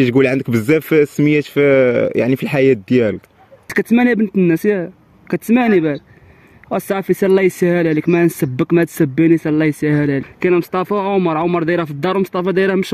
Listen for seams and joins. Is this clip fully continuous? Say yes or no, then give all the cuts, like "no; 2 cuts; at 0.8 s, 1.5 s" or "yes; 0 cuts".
no; 2 cuts; at 3.7 s, 10.3 s